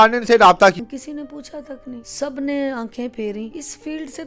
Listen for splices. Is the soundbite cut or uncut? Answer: cut